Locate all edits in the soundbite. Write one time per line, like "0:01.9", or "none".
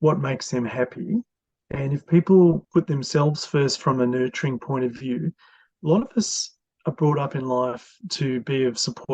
0:02.6

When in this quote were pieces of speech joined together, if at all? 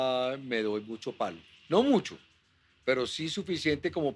0:01.5

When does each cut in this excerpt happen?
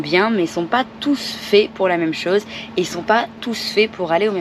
none

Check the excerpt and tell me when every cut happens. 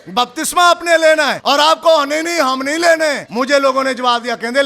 0:01.4
0:03.2

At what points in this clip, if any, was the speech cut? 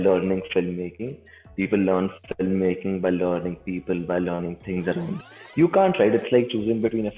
0:05.2

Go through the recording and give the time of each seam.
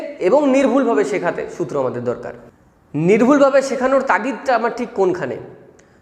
0:02.8

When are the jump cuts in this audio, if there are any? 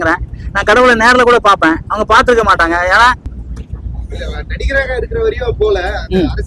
0:03.3

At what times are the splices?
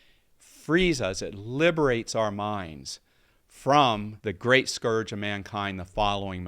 0:04.1

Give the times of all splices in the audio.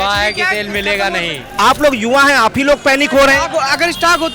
0:01.5

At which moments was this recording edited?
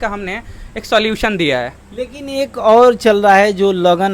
none

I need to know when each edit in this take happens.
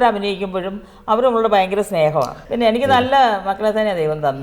0:02.4

